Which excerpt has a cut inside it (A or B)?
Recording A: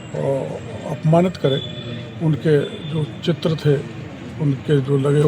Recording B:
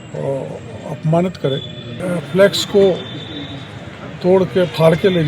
B